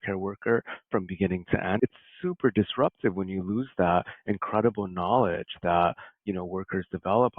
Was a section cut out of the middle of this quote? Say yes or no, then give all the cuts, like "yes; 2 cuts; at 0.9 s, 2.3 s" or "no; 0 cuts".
yes; 1 cut; at 1.8 s